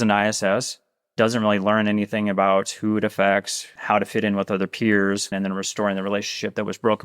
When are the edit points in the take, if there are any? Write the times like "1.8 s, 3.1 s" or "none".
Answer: 3.6 s, 5.3 s